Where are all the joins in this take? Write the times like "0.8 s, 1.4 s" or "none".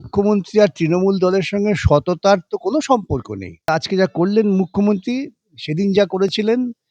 3.7 s

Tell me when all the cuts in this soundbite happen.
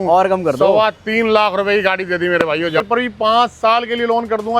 2.8 s

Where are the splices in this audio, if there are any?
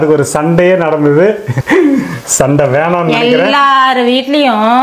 1.5 s

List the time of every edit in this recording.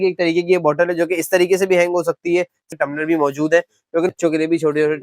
2.7 s, 4.1 s

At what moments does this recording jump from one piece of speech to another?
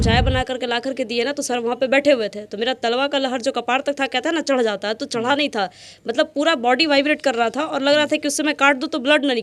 none

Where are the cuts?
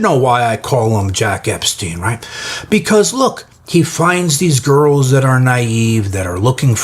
none

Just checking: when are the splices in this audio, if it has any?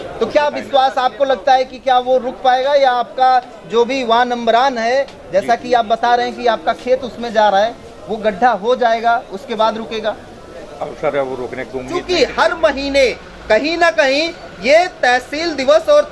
11.9 s

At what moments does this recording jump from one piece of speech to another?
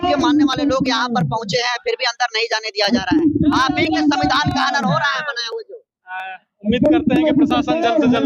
none

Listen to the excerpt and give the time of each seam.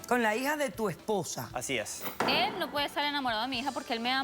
2.1 s

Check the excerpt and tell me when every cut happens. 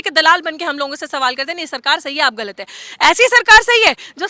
none

